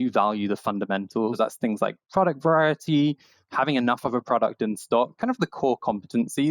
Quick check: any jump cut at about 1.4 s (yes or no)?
yes